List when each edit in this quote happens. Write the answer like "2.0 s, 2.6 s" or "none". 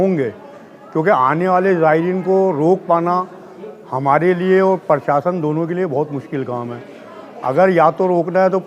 none